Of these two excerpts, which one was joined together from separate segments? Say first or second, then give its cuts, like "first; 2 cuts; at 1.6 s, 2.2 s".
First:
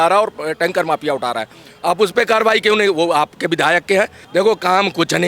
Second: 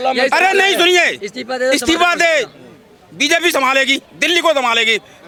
first; 1 cut; at 4.2 s